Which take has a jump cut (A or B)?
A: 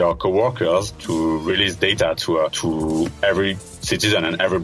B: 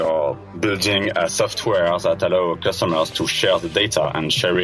A